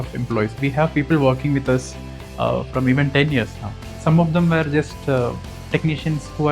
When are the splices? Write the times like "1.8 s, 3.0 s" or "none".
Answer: none